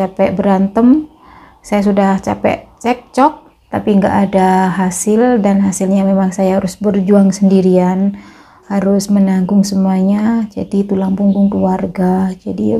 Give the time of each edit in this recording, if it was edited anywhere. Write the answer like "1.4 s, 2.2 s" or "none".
3.5 s